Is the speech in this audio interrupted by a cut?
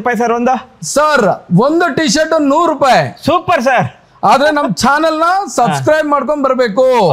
no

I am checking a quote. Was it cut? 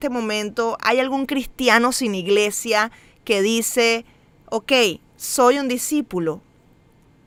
no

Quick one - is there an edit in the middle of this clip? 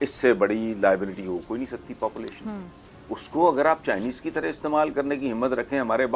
no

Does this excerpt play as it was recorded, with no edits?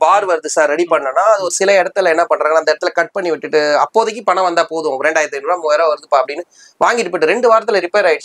yes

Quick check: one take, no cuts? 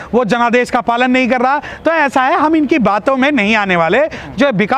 yes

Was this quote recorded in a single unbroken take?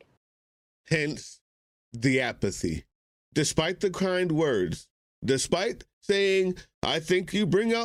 yes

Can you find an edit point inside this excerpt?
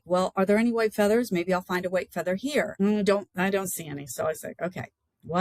yes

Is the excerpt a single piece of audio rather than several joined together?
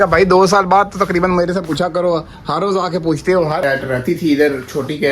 no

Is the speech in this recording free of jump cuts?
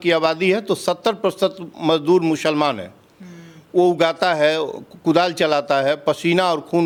yes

